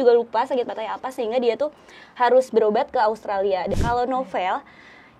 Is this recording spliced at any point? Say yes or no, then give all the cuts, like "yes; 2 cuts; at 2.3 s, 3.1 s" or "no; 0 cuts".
yes; 1 cut; at 3.8 s